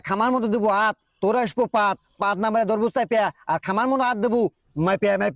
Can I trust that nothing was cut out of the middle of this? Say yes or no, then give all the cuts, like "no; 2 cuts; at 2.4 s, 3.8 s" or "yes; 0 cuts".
yes; 0 cuts